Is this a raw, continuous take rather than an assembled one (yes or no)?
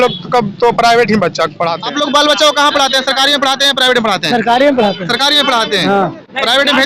no